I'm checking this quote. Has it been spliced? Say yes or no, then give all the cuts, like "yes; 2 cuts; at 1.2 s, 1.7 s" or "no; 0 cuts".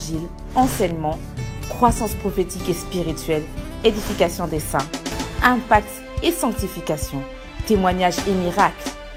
no; 0 cuts